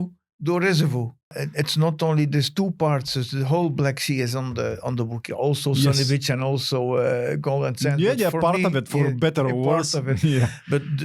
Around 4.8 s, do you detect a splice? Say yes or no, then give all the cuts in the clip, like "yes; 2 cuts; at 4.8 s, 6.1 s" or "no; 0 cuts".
no; 1 cut; at 1.4 s